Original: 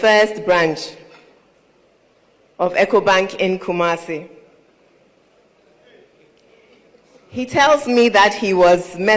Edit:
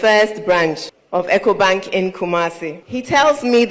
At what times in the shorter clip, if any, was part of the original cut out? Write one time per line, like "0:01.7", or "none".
0:00.9
0:02.7